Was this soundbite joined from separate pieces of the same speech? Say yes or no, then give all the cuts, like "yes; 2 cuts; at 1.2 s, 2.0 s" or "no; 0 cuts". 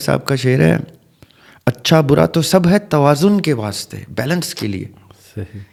no; 0 cuts